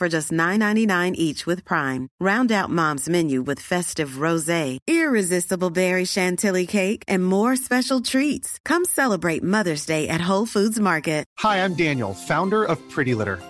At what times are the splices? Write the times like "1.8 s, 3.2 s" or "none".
none